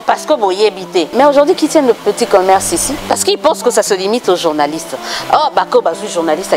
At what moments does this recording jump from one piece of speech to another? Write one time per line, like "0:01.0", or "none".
0:01.1
0:03.0